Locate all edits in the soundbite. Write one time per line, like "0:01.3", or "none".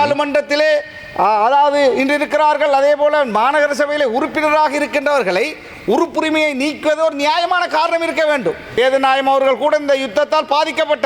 0:08.7